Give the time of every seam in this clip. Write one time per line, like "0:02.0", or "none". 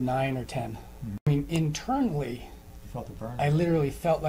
0:01.3